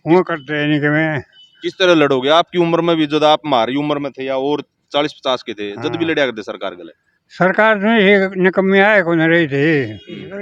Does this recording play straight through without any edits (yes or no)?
yes